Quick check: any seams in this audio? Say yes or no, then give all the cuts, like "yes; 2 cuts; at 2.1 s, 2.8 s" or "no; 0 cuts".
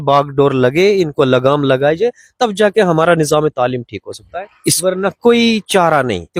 no; 0 cuts